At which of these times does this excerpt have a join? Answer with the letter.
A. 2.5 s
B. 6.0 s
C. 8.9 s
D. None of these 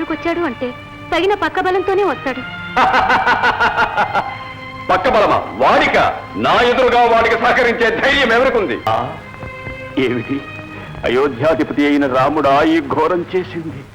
C